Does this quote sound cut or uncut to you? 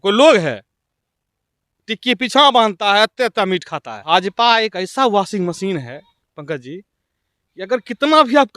cut